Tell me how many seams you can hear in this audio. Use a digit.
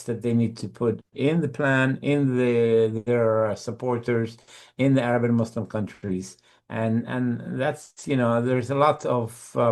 0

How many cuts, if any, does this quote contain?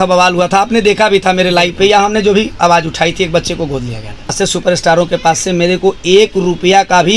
1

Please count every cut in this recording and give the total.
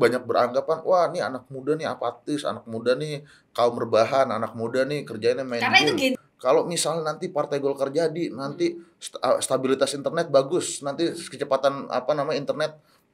1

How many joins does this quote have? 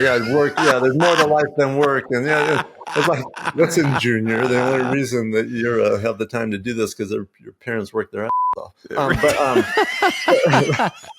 1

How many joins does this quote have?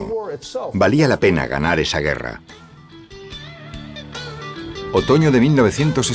1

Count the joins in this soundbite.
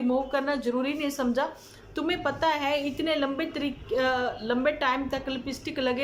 0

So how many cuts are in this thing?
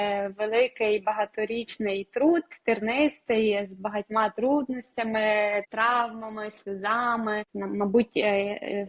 2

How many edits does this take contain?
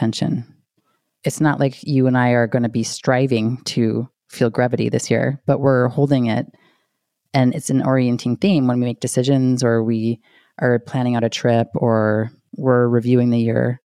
1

